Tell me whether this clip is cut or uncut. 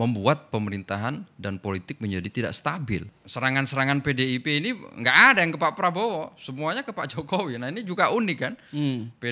cut